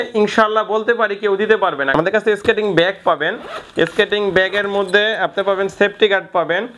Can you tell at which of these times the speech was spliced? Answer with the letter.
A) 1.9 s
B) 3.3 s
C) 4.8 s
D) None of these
A